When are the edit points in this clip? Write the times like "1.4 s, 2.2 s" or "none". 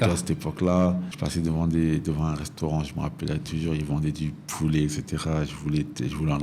1.1 s